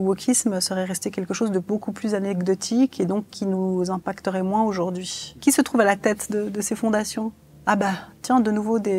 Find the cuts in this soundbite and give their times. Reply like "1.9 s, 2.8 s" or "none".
5.3 s